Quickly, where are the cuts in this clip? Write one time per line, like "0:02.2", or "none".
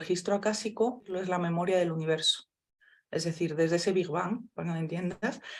0:01.1